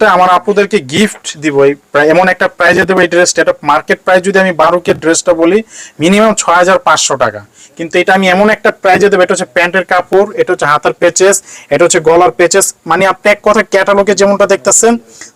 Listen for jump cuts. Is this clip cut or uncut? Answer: uncut